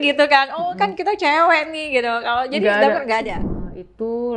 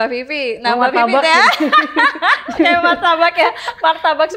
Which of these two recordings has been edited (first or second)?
first